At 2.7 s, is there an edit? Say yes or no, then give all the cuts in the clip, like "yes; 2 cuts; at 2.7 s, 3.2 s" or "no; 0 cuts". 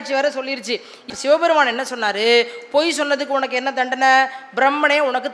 no; 1 cut; at 1.1 s